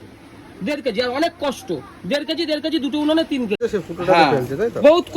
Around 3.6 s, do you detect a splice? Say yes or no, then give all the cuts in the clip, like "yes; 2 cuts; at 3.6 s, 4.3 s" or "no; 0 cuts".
yes; 1 cut; at 3.6 s